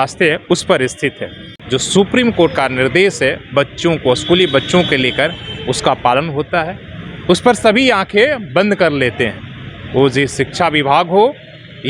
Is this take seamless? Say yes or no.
no